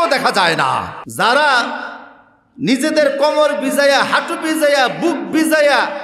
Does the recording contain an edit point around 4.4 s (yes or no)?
no